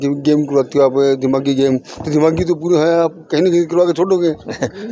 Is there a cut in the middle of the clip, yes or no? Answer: no